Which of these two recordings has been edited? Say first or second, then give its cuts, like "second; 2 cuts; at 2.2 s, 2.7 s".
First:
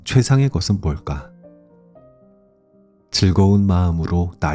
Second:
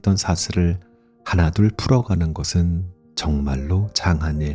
first; 2 cuts; at 1.5 s, 3.1 s